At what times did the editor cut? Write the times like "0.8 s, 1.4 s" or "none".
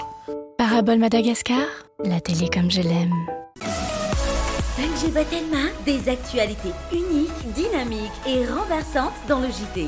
3.5 s